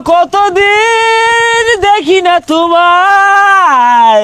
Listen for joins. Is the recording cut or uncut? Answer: uncut